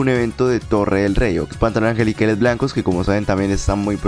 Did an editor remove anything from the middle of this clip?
yes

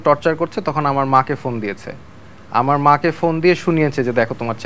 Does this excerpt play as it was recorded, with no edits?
yes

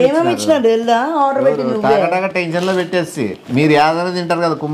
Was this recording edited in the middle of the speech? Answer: yes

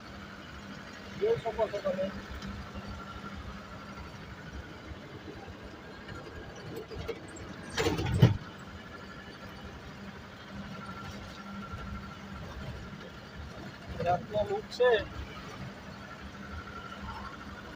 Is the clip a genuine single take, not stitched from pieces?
yes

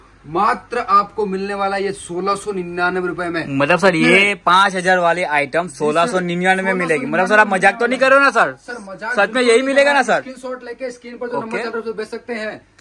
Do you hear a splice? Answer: no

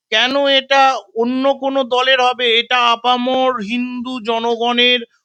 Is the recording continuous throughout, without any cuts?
yes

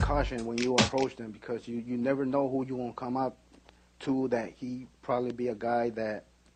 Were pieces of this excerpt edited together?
no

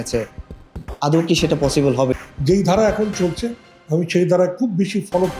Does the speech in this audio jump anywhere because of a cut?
yes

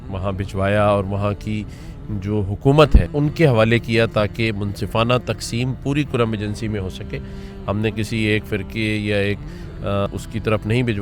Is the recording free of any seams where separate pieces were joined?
no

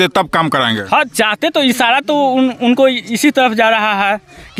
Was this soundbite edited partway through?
no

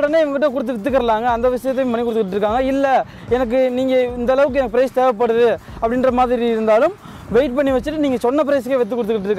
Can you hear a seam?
no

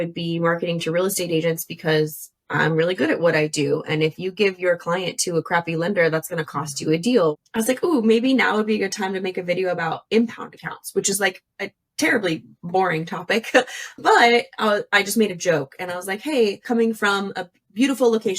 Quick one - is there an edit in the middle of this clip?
yes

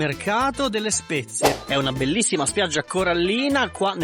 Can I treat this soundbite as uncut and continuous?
no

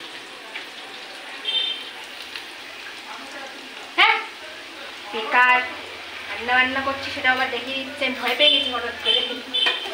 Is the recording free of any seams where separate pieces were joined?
yes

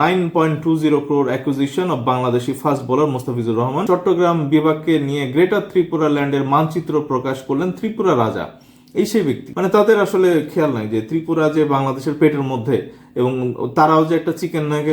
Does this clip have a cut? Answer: yes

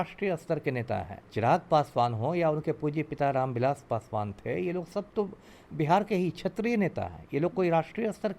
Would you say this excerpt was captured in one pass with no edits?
no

